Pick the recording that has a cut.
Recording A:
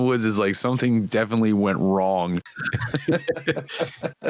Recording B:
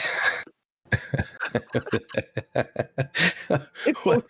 A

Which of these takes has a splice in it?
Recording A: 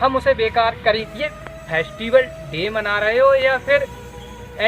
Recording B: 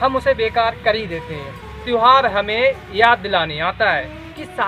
A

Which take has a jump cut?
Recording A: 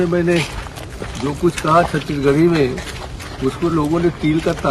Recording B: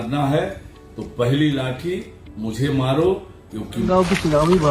B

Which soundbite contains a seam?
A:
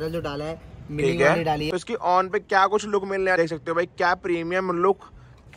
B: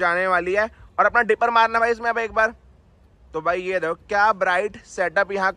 A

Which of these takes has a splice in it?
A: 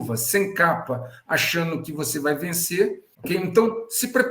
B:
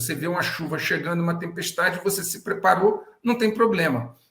A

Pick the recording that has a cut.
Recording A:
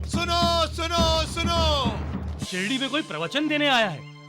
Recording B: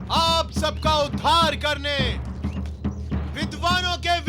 A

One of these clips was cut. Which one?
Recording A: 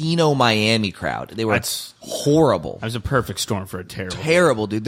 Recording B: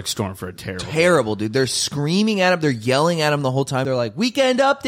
B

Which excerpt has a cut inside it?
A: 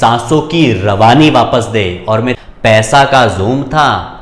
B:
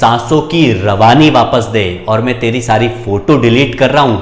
A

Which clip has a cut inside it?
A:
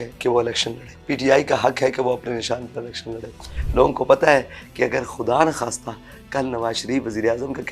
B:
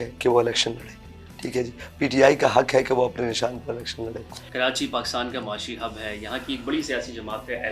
A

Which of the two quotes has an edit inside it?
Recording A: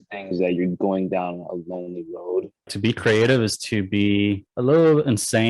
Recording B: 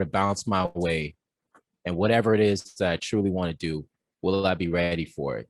A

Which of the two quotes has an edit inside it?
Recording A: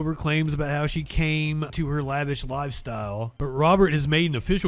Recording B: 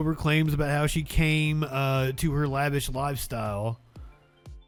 A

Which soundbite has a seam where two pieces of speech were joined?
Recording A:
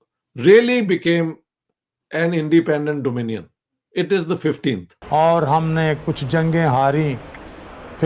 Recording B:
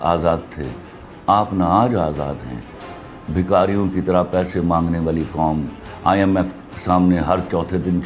A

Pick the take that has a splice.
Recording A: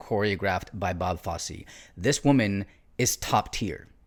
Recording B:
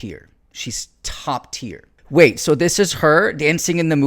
B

